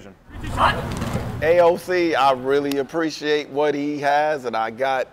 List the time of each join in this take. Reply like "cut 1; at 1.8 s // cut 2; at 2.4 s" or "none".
none